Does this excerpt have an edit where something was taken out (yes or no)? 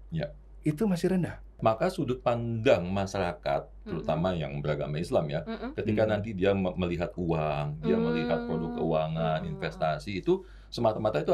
yes